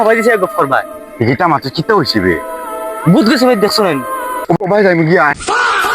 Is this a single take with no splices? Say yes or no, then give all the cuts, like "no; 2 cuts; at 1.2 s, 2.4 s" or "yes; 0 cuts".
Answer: no; 1 cut; at 4.4 s